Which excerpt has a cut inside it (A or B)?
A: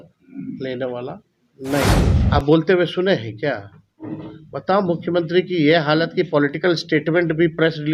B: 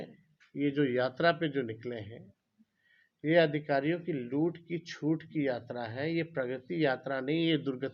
A